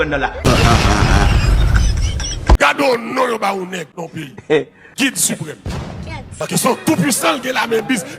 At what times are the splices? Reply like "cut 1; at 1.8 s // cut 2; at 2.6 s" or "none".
cut 1; at 2.6 s // cut 2; at 6.3 s